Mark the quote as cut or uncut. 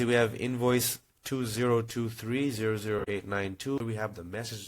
cut